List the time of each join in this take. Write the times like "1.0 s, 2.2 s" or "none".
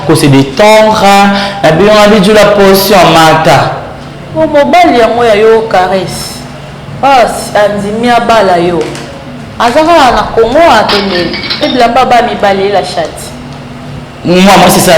11.6 s